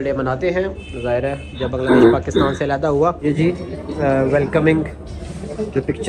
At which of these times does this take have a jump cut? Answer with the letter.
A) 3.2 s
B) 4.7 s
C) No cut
A